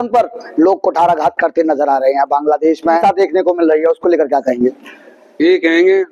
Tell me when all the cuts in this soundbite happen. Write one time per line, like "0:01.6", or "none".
0:03.0